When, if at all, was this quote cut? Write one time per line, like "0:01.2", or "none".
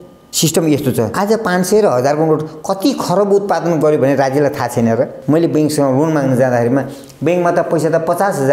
0:01.1
0:05.2